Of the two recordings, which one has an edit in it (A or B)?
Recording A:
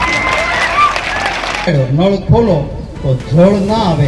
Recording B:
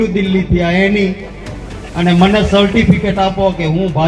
A